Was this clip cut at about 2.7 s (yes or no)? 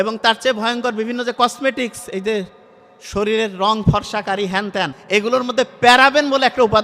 no